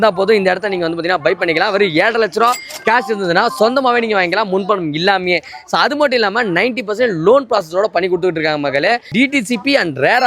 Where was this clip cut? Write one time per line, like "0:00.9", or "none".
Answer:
none